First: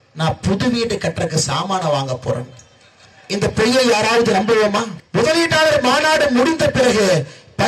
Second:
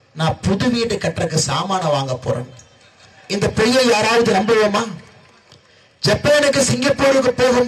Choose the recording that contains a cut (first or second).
first